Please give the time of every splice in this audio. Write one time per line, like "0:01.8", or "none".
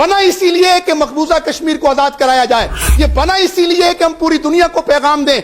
none